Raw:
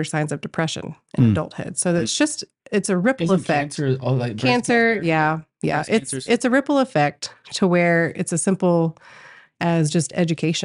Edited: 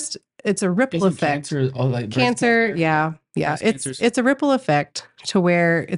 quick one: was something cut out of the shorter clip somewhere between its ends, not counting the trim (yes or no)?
no